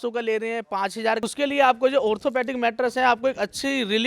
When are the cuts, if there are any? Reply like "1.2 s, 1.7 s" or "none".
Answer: 1.2 s